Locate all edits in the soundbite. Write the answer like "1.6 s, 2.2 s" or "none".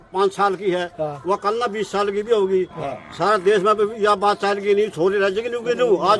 none